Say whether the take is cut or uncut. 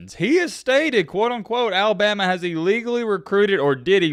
uncut